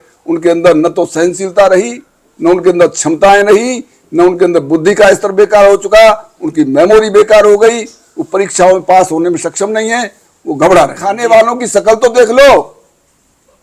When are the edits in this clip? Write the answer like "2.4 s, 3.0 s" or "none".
11.1 s